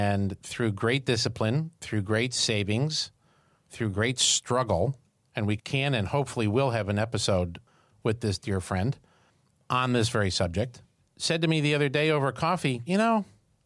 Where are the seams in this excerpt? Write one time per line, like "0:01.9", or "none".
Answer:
0:05.6